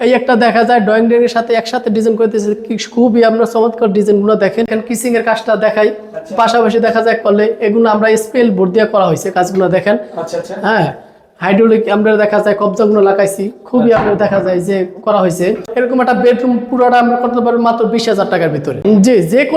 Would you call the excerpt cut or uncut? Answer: cut